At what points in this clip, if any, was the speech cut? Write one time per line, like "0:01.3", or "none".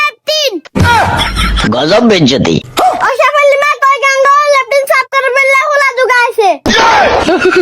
0:02.7